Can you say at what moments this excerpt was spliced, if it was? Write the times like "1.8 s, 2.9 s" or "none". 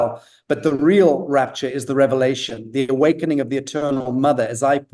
2.9 s